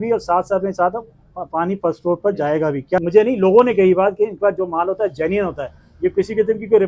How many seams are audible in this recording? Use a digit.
1